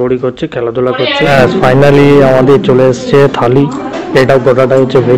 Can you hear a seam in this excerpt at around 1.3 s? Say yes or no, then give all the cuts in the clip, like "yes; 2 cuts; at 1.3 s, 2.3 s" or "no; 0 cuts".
yes; 1 cut; at 1.3 s